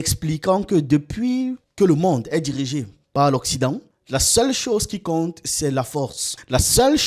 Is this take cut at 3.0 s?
no; 0 cuts

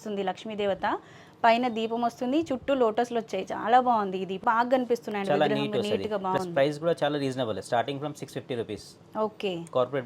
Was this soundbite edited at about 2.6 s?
no; 1 cut; at 4.4 s

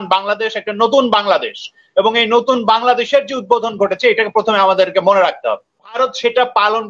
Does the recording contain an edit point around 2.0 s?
no; 1 cut; at 6.0 s

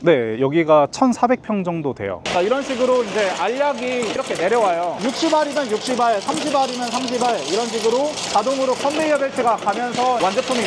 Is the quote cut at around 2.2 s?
yes; 1 cut; at 2.2 s

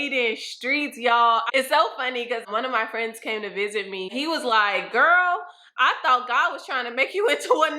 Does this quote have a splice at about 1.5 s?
yes; 3 cuts; at 1.5 s, 2.4 s, 4.1 s

